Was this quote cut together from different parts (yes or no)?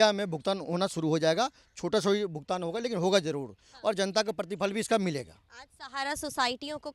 no